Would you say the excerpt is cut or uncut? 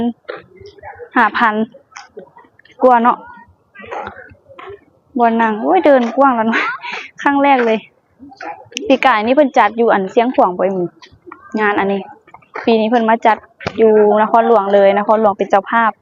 uncut